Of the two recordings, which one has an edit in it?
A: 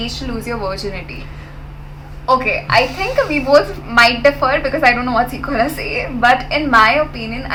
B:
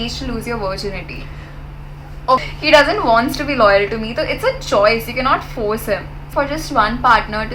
B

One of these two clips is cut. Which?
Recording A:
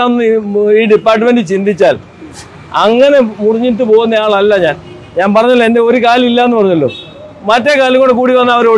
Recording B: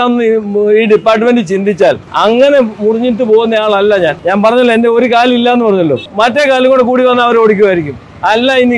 B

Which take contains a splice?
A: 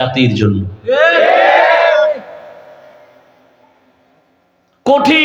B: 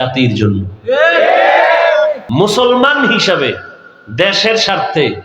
B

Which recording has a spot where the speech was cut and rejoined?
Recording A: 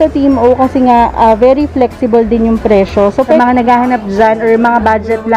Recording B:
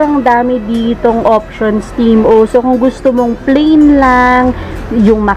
A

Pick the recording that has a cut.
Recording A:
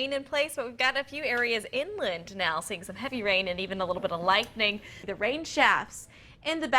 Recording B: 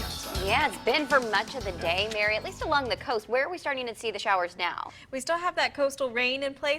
A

